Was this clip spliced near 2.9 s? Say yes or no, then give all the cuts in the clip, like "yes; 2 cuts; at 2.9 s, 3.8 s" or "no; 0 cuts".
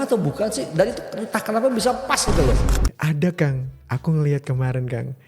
yes; 1 cut; at 2.9 s